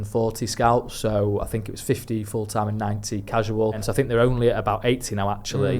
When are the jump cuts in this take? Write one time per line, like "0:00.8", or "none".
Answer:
0:03.9